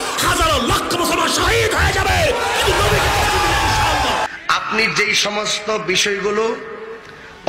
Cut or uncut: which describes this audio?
cut